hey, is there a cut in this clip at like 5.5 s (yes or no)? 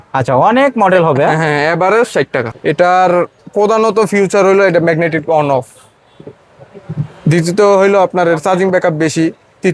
no